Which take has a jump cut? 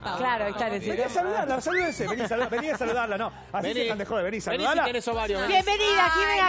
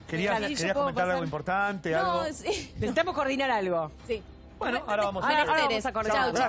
first; 1 cut; at 5.4 s

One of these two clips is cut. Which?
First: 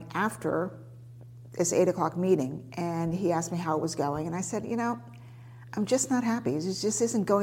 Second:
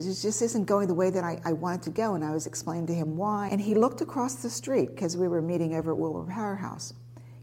second; 1 cut; at 3.5 s

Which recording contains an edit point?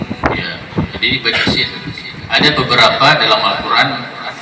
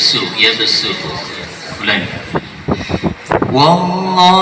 second; 1 cut; at 2.4 s

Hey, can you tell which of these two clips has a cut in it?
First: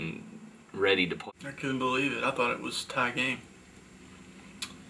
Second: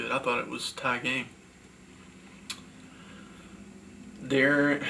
first; 1 cut; at 1.2 s

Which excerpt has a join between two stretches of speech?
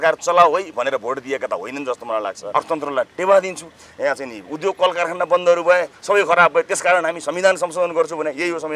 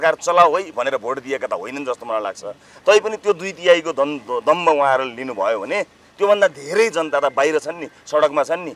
first; 1 cut; at 2.4 s

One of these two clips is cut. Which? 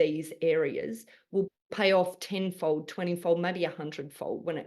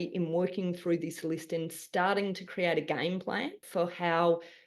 second; 1 cut; at 3.6 s

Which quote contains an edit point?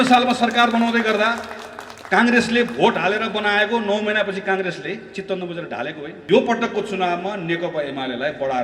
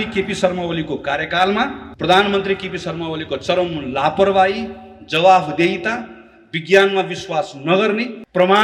first; 1 cut; at 6.1 s

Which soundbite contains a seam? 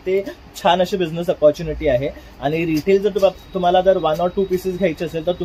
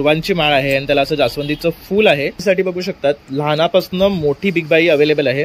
second; 1 cut; at 2.4 s

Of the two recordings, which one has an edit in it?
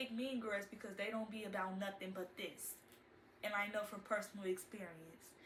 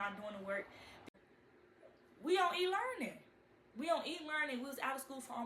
second; 1 cut; at 1.1 s

